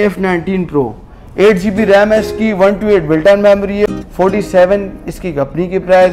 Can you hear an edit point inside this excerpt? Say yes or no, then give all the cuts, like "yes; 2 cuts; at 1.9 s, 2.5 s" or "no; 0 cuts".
yes; 1 cut; at 3.9 s